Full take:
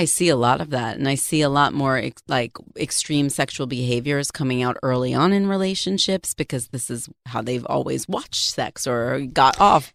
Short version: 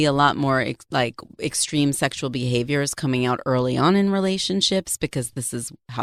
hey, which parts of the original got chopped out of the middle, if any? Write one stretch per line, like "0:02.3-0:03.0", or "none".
none